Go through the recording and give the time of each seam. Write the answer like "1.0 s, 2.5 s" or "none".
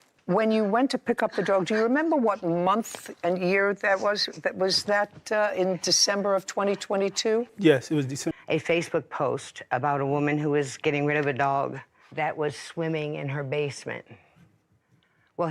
8.3 s